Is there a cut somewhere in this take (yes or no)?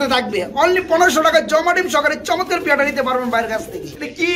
no